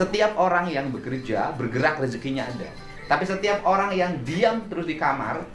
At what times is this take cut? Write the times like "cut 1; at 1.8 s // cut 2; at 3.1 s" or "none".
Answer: none